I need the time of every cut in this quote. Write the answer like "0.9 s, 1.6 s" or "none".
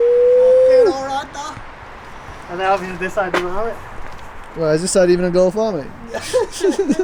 none